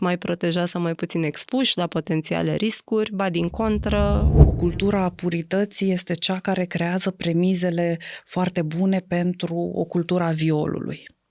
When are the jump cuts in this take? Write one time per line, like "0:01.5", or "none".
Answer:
0:04.4